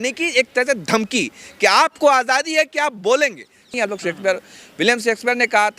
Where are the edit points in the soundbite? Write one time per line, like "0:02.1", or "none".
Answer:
0:03.7

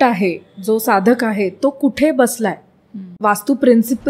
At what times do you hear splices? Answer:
0:03.1

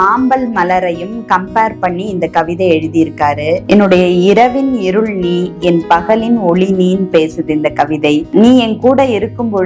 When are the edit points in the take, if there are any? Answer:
0:03.6

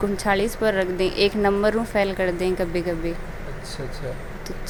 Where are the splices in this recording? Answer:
none

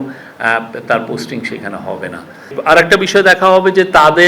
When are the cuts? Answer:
0:02.6

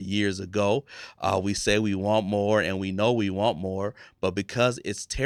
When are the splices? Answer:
none

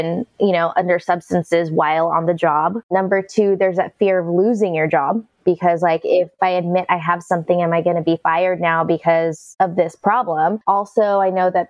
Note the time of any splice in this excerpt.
0:09.4
0:10.6

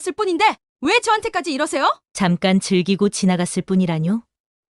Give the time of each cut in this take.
0:02.0

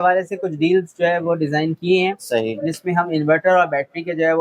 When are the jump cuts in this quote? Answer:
none

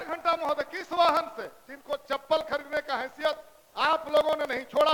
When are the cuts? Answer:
none

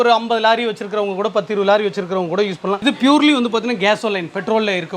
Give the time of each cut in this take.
0:02.8

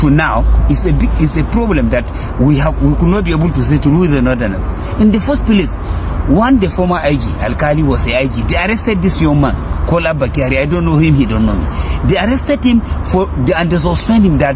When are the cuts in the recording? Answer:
none

